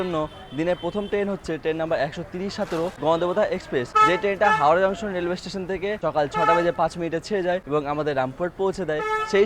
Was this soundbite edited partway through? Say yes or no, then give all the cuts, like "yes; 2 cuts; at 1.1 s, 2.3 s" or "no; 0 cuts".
yes; 4 cuts; at 3.0 s, 3.9 s, 6.0 s, 7.6 s